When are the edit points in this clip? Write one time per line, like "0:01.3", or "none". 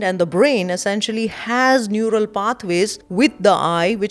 0:03.0